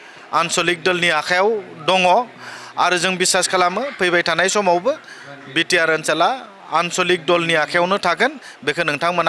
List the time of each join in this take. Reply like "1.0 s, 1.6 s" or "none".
none